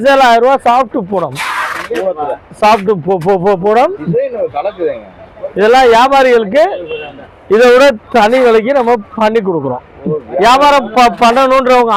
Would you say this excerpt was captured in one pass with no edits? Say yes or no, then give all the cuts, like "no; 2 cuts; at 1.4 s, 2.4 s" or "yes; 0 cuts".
yes; 0 cuts